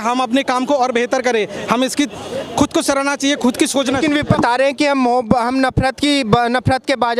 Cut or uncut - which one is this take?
cut